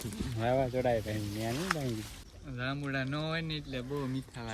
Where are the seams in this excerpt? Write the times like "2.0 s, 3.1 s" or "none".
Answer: 2.2 s